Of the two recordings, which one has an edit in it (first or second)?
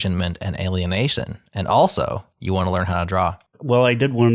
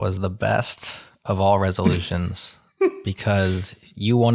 first